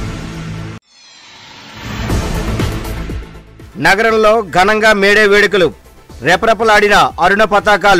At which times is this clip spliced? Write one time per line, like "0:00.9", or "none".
0:02.9